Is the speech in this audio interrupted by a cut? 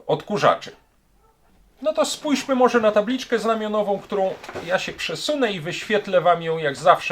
no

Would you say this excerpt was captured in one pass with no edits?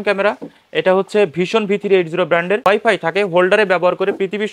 no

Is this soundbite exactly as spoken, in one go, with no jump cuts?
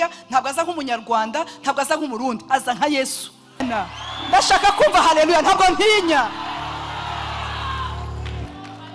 no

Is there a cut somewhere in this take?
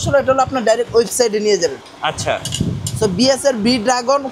no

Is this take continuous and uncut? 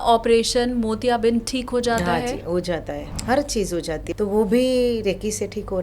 no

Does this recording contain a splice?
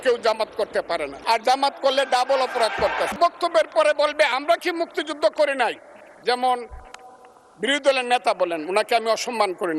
no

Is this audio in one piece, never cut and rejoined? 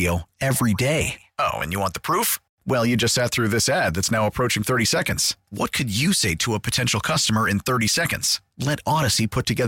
yes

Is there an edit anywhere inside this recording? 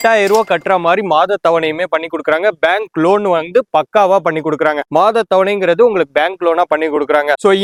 no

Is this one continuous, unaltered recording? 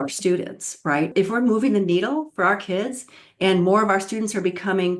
no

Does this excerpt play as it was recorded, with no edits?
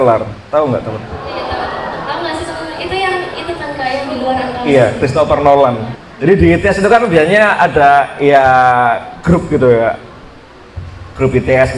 no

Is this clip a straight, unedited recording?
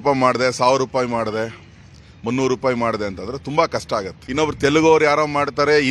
no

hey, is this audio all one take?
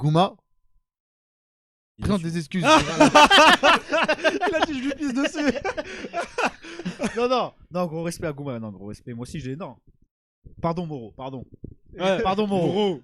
yes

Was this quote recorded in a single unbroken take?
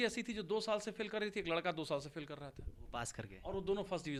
yes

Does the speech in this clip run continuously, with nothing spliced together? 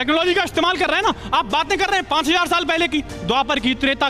yes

